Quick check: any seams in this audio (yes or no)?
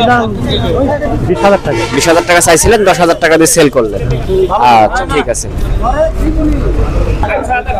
no